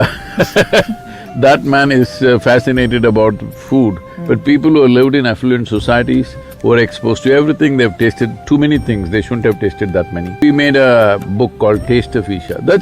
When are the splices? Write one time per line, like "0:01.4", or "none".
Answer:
0:10.4